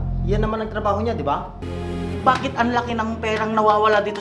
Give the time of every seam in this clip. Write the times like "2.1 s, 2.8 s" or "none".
1.7 s

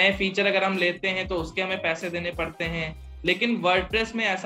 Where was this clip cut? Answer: none

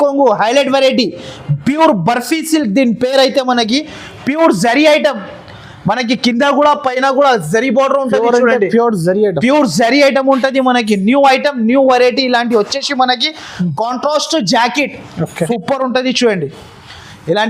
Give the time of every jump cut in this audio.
15.5 s

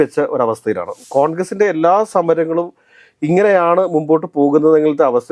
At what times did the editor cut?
0.9 s

